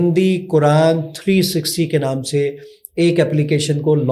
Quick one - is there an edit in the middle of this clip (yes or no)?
no